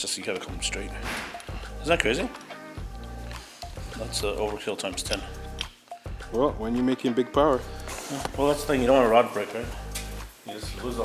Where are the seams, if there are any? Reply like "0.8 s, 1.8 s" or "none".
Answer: none